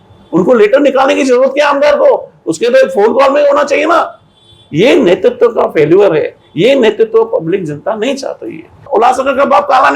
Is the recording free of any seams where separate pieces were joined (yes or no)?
no